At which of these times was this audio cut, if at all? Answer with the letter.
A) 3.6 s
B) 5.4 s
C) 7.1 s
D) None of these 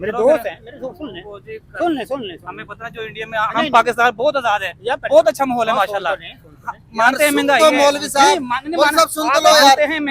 D